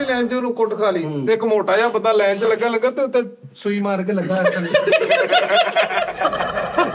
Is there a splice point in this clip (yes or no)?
no